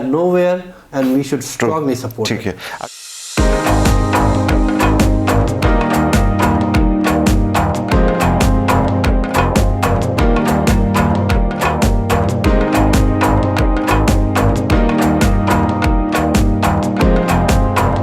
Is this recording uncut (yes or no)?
yes